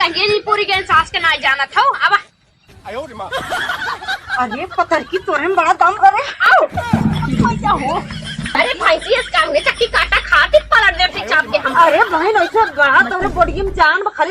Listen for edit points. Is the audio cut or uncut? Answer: uncut